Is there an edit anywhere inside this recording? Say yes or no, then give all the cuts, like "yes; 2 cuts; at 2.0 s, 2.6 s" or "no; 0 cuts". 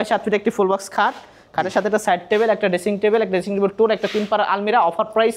no; 0 cuts